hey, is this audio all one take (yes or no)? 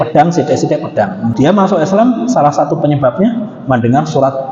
no